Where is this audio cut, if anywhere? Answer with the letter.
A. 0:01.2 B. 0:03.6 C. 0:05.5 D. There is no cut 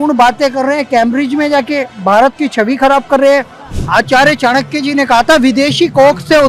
B